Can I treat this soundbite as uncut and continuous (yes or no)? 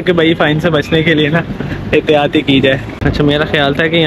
no